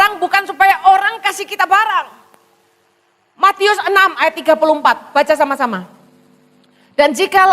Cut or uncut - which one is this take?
uncut